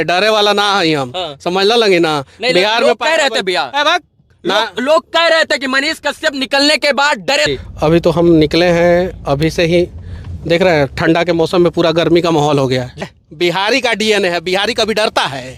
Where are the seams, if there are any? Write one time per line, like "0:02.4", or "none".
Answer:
0:07.5
0:13.0